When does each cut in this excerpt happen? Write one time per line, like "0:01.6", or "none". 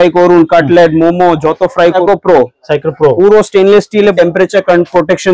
0:02.0
0:04.1